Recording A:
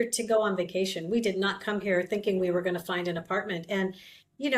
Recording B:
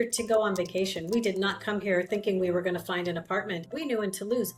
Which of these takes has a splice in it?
B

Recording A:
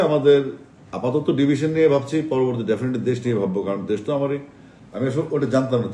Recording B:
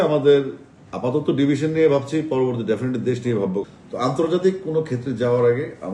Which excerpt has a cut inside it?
B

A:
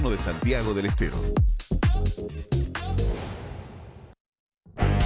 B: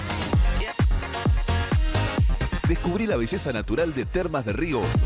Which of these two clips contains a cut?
A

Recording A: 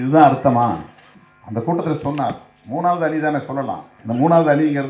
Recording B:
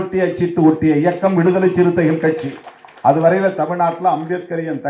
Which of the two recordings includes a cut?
A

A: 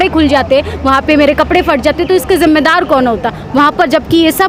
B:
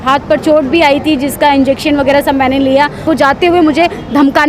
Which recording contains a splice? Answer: B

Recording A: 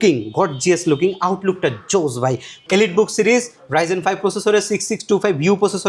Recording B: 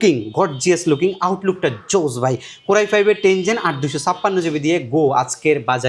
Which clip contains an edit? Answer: A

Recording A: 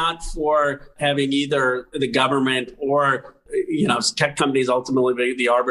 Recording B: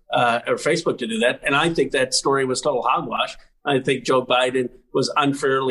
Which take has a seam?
A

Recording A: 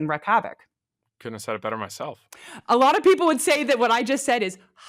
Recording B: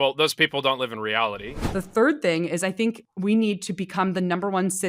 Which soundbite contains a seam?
B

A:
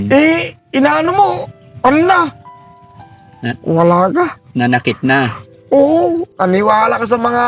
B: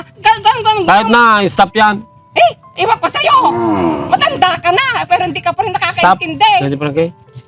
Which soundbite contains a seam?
A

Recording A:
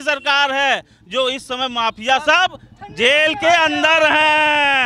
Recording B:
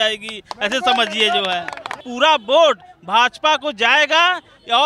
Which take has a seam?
B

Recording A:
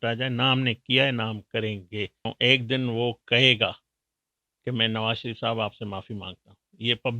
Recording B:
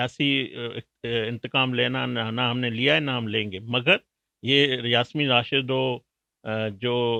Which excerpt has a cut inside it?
A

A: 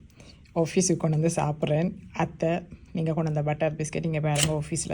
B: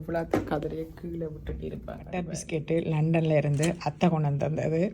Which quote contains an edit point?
B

